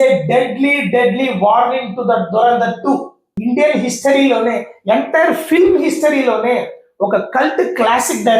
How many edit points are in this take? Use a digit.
1